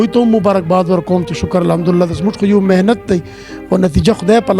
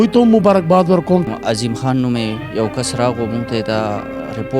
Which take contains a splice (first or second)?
second